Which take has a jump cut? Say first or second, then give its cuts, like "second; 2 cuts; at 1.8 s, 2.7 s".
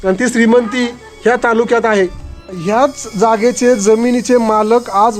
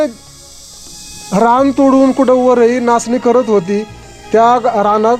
first; 1 cut; at 2.3 s